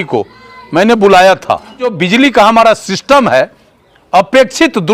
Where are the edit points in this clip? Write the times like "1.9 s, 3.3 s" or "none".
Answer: 1.9 s